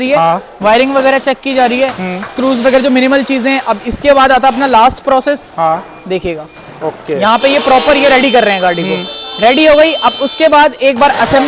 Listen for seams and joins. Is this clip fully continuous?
yes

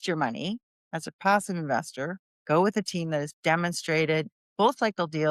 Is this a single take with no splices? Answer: no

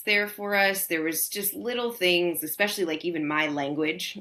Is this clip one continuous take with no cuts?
yes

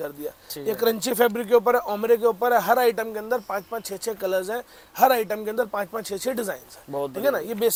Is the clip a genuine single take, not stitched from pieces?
yes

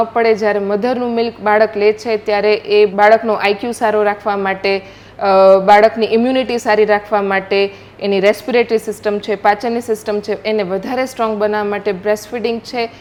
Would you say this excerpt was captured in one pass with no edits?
yes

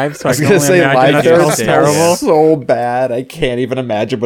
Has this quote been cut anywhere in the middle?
no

